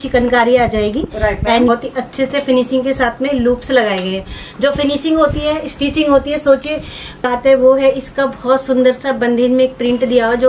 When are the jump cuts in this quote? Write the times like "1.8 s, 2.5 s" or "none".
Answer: 1.7 s, 7.2 s